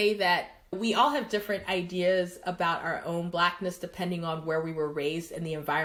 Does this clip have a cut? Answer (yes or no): no